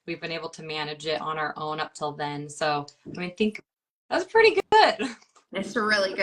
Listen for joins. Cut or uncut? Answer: cut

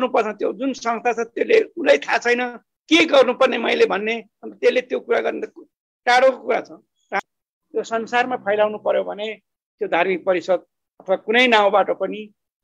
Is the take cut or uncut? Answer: cut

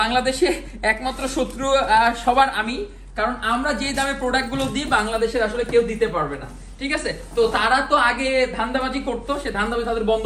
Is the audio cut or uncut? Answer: uncut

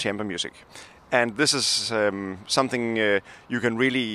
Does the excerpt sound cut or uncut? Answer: uncut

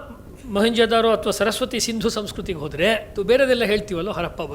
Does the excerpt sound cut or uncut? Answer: cut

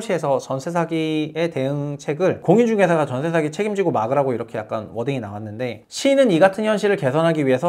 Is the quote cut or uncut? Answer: uncut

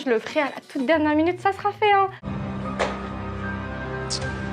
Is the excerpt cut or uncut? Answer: cut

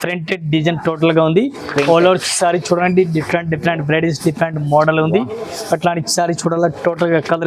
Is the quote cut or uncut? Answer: uncut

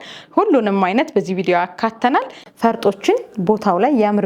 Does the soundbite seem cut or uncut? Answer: cut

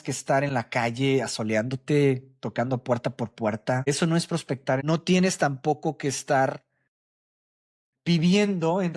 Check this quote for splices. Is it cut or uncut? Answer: cut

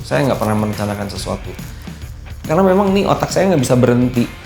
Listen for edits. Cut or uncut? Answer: cut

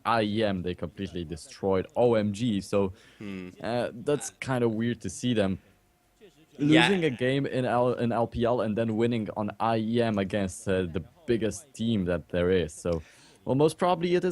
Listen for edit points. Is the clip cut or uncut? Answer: cut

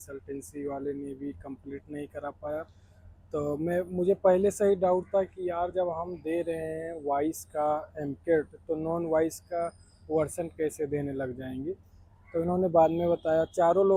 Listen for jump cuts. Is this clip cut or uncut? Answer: uncut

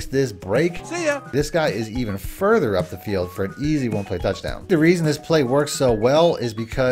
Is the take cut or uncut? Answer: cut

